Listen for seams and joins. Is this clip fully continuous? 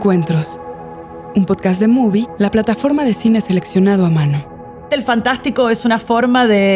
no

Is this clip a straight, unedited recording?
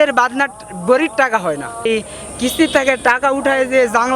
no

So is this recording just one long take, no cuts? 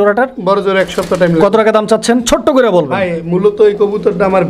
yes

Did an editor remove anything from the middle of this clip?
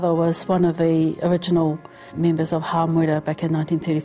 yes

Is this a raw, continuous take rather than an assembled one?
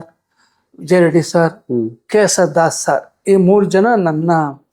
yes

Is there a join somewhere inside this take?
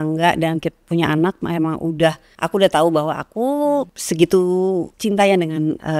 yes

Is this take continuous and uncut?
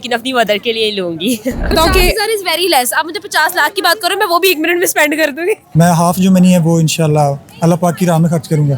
no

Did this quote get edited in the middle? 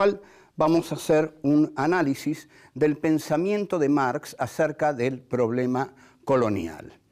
yes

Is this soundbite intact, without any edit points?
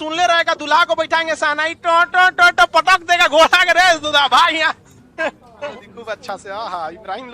no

